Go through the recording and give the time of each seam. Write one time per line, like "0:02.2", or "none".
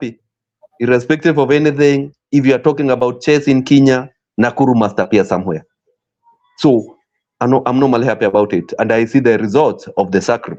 none